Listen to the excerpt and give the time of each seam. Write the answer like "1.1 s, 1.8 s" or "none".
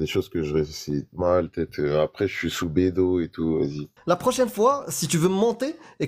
3.9 s